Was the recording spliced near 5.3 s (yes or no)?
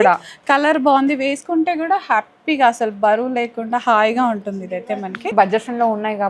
yes